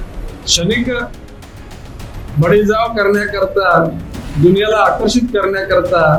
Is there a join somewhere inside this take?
no; 0 cuts

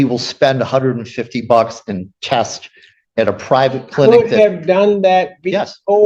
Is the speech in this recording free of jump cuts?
yes; 0 cuts

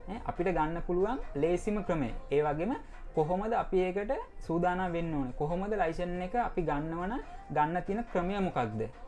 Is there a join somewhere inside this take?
no; 0 cuts

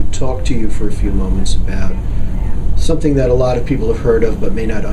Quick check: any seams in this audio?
no; 0 cuts

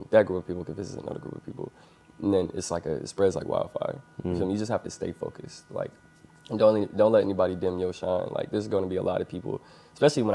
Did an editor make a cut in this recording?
no; 0 cuts

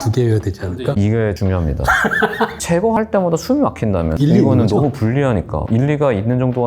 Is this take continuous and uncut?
no; 4 cuts; at 1.0 s, 2.6 s, 4.2 s, 5.6 s

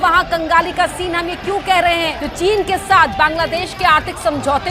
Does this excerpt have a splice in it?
yes; 1 cut; at 2.2 s

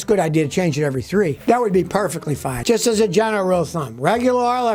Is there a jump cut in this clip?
no; 0 cuts

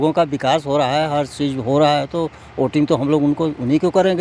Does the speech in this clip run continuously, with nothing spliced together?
yes; 0 cuts

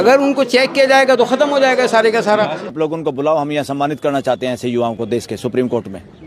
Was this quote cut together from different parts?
yes; 1 cut; at 2.6 s

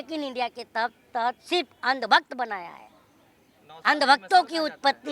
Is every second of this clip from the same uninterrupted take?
yes; 0 cuts

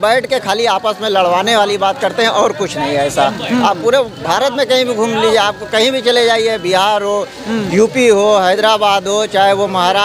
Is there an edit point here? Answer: no; 0 cuts

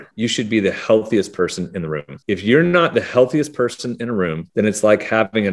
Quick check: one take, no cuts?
yes; 0 cuts

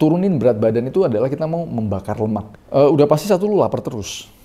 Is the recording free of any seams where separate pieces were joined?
no; 1 cut; at 2.5 s

